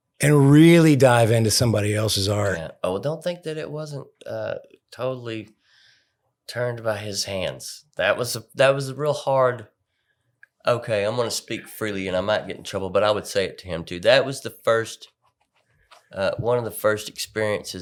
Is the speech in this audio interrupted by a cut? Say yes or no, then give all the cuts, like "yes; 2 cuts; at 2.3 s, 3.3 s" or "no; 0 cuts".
no; 0 cuts